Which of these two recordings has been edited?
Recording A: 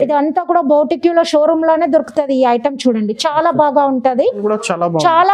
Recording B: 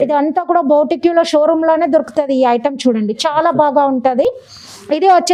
A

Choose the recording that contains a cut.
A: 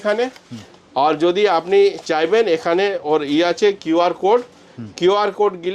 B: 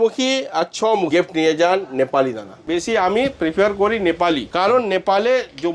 B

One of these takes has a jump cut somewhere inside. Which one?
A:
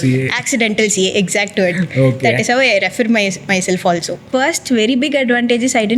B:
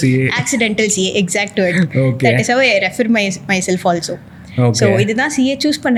A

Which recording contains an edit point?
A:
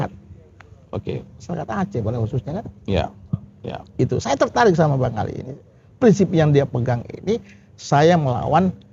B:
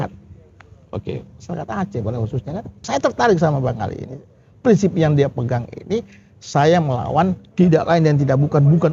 B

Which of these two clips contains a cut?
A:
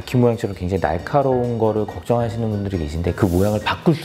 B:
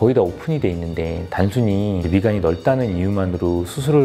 B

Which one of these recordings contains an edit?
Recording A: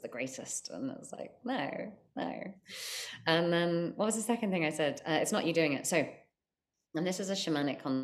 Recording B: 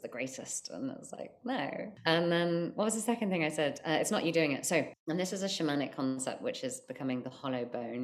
B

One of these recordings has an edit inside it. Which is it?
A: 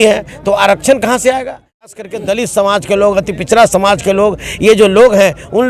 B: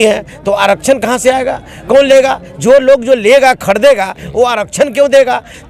A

